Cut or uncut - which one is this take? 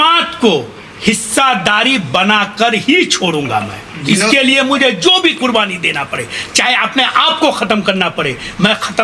uncut